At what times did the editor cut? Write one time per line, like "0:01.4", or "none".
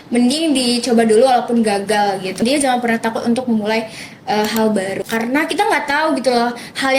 0:02.4
0:05.0